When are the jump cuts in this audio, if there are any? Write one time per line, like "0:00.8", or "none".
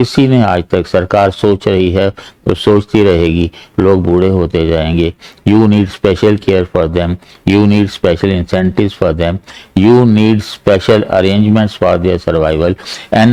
none

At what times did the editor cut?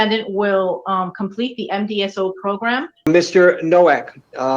0:03.1

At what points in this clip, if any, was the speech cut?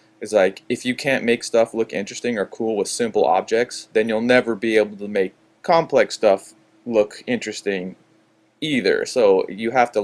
0:05.4

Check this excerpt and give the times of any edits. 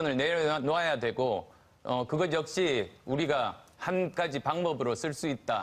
0:02.2

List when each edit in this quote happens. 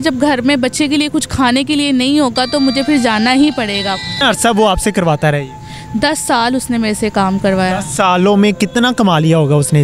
0:04.2

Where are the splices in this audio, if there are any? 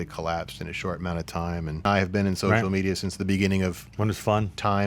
0:01.9

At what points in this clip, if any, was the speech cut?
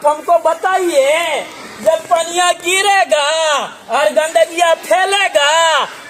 none

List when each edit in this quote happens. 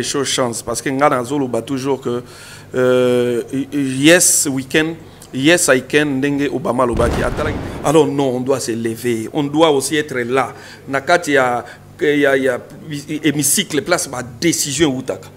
0:07.5

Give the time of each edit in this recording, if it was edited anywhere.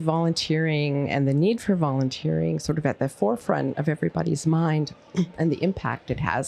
0:03.8

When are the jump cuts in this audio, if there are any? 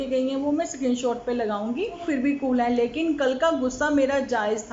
0:02.0

